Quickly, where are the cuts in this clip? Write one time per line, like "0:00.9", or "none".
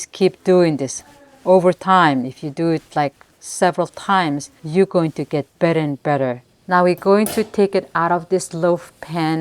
0:04.5
0:06.4